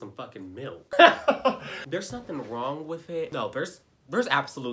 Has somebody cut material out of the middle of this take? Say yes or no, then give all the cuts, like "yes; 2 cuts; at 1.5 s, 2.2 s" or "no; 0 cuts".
yes; 3 cuts; at 0.9 s, 1.7 s, 3.3 s